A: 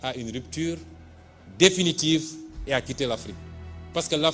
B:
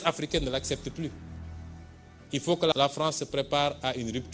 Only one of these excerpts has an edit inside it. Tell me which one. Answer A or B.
B